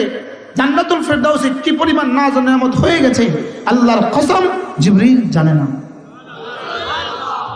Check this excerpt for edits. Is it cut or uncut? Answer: uncut